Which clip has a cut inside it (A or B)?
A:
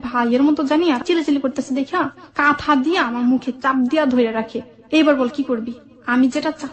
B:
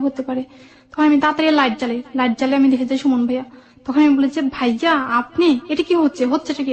A